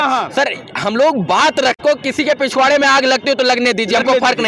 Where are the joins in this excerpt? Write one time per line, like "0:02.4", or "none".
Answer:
0:01.8